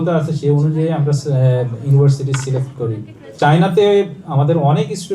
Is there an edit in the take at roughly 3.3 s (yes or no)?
yes